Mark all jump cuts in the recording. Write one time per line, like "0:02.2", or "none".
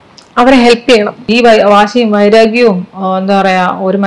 0:01.2

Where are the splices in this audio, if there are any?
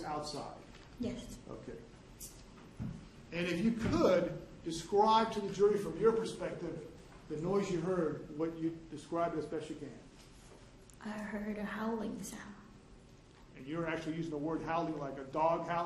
0:02.3

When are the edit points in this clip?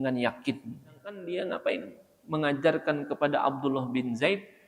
0:01.2

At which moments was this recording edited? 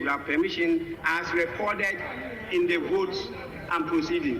0:01.0

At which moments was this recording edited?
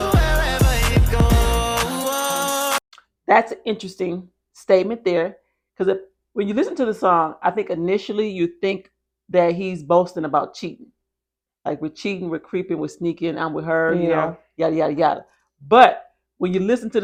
none

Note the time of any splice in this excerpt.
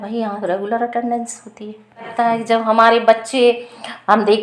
0:02.1

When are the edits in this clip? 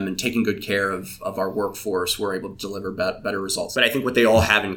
0:03.6

